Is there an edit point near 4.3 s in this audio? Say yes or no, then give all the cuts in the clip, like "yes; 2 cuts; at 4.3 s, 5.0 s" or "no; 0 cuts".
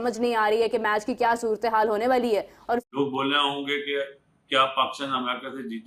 no; 1 cut; at 2.8 s